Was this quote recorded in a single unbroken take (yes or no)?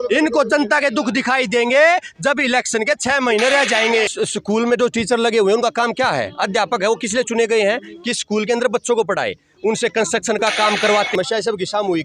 no